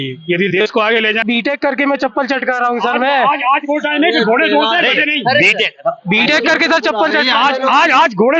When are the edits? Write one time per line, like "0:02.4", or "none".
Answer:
0:01.2